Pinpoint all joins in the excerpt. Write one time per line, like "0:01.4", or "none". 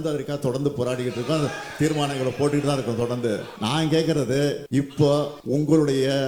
0:03.5
0:04.6
0:05.4